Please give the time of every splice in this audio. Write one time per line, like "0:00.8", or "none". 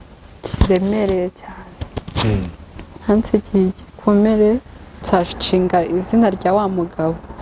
0:05.0